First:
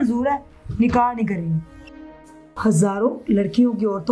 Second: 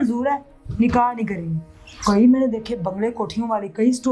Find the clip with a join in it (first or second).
first